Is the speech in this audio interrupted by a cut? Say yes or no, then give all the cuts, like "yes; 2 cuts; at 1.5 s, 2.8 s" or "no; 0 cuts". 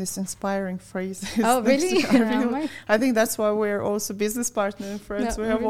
no; 0 cuts